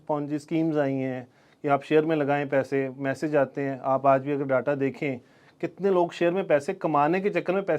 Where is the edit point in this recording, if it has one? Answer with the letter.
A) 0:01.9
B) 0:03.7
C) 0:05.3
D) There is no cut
D